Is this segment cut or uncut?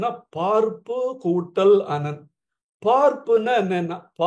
uncut